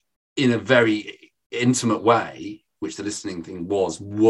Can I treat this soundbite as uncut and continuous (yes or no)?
yes